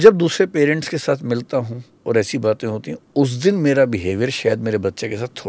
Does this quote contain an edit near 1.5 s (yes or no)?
no